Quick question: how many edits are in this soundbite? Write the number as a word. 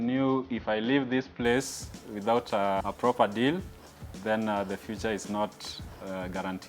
one